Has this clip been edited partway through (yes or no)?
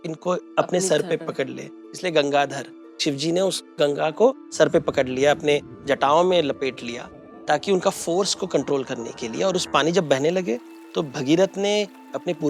no